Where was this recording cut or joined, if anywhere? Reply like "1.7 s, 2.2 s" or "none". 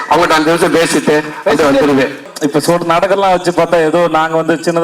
2.2 s

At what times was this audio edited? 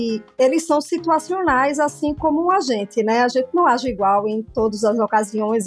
none

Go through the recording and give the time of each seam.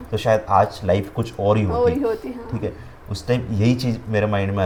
none

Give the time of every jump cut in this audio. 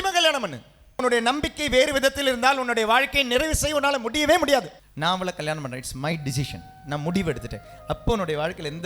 1.0 s, 4.8 s

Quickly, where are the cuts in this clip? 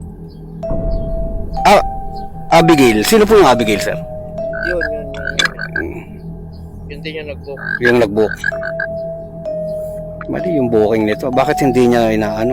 none

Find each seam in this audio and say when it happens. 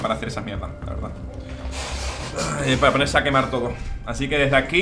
none

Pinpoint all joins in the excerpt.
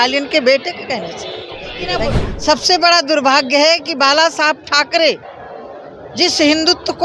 2.0 s

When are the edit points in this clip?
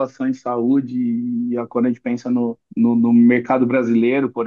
2.6 s

